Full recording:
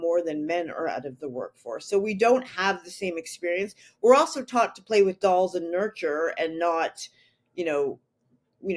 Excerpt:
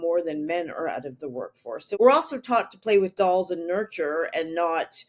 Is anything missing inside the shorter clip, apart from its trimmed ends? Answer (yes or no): yes